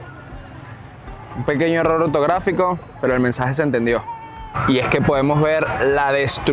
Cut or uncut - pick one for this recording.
uncut